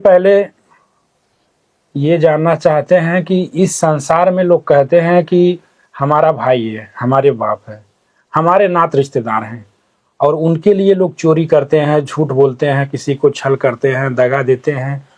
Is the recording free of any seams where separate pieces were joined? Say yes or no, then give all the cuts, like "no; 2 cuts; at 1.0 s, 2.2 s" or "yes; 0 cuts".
yes; 0 cuts